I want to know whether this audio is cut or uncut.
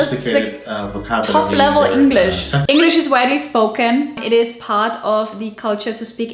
cut